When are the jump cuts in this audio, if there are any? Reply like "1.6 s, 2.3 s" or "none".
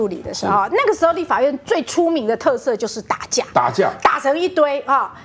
none